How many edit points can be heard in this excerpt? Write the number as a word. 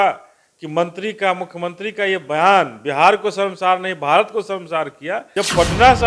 one